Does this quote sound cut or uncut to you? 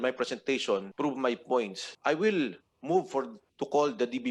cut